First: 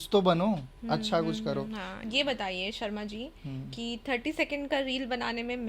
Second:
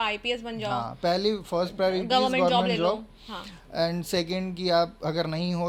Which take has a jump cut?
first; 1 cut; at 1.9 s

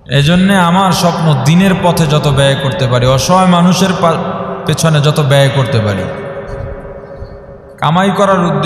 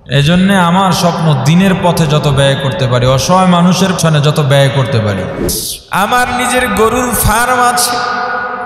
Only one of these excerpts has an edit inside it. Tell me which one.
second; 2 cuts; at 4.0 s, 5.5 s

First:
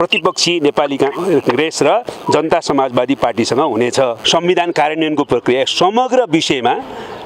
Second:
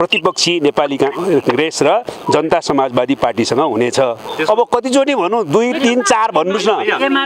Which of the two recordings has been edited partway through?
first; 1 cut; at 4.2 s

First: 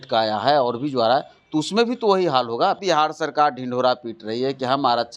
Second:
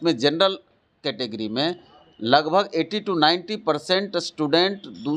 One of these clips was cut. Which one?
first; 1 cut; at 2.8 s

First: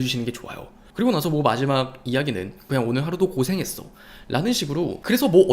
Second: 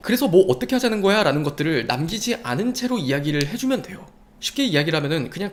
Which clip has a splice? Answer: first; 1 cut; at 2.7 s

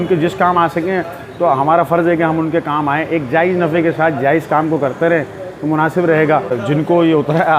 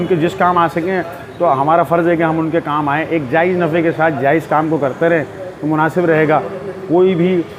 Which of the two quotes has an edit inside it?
first; 1 cut; at 6.6 s

